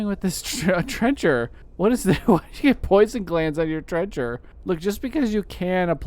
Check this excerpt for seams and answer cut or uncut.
cut